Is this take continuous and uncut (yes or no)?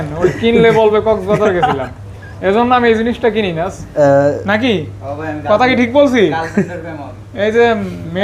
no